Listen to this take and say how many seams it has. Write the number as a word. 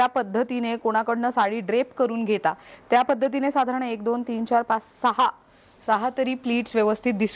zero